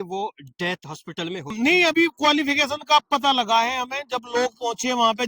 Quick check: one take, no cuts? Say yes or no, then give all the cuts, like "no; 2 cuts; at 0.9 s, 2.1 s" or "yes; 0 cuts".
no; 1 cut; at 1.5 s